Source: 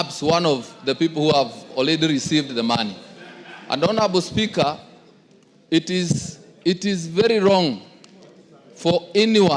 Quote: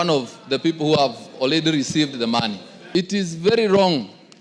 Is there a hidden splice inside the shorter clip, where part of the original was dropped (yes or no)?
yes